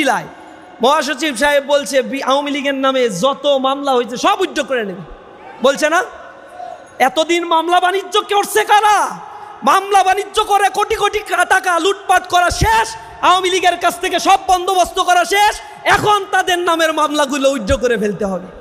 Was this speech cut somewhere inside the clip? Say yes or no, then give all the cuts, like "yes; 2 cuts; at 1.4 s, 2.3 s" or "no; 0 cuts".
no; 0 cuts